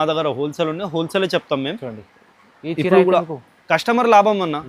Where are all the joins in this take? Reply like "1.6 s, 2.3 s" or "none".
none